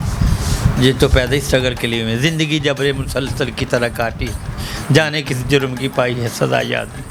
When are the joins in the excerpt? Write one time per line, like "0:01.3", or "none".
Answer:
none